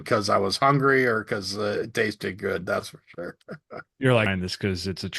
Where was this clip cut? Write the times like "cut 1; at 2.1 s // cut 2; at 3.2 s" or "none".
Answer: cut 1; at 4.3 s